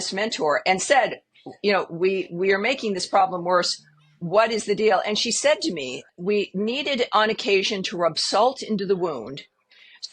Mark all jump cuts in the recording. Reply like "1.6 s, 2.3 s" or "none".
6.1 s